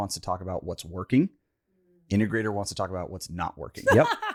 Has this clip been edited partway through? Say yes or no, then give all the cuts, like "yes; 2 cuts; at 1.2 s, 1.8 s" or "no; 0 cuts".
no; 0 cuts